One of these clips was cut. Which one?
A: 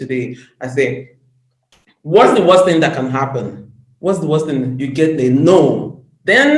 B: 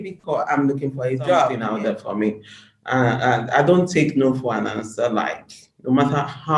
B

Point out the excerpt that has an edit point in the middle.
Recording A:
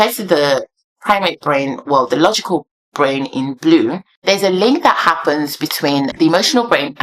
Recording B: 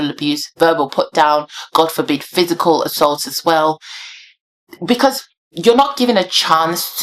A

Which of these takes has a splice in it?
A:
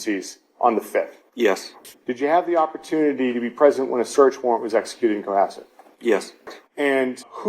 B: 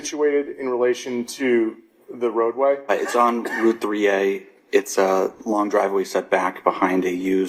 A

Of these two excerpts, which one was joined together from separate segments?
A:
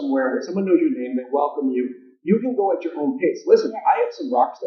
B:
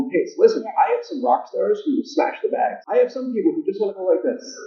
B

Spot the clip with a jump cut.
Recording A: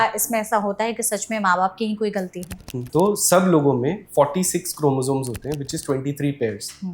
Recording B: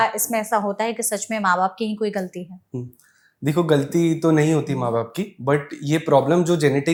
A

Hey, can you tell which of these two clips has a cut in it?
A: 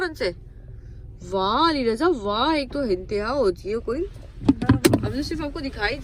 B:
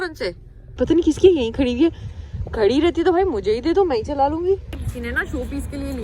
B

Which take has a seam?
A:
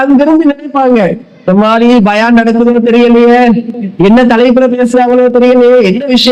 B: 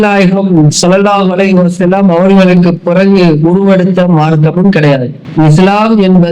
B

